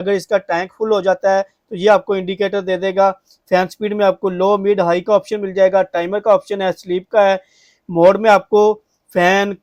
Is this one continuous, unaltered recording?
yes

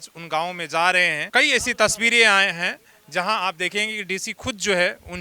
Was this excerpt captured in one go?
no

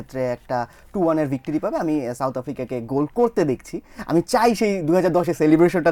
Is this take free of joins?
yes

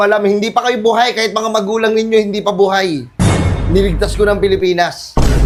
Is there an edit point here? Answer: no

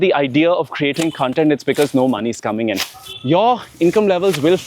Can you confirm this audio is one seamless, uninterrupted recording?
no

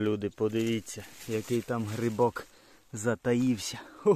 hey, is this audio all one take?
yes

